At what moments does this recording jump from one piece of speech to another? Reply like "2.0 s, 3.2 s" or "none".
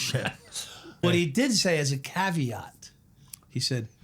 1.0 s